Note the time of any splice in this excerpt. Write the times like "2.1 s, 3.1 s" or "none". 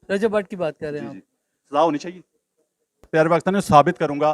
3.1 s